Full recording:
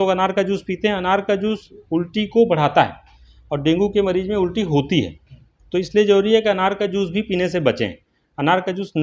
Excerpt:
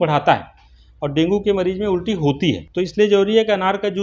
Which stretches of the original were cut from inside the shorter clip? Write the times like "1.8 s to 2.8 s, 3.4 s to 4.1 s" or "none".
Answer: 5.1 s to 5.6 s